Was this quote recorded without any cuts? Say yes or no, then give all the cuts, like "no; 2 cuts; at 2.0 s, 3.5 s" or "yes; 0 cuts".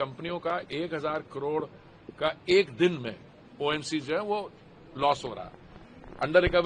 yes; 0 cuts